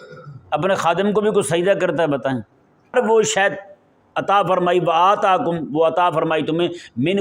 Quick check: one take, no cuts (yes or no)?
no